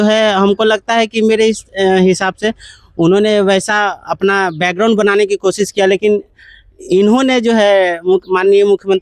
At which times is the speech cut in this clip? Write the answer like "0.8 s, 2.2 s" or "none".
none